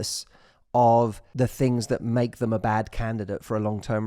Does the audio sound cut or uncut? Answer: cut